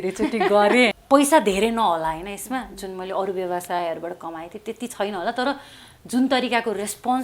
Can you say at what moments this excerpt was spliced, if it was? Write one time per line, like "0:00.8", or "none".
0:01.0